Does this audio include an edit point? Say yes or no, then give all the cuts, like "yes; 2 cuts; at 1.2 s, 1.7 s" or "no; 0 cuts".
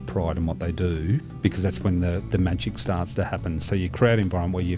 yes; 1 cut; at 1.3 s